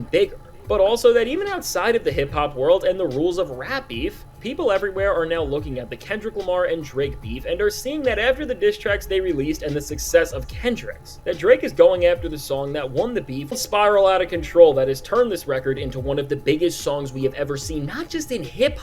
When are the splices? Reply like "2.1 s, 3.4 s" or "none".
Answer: 13.6 s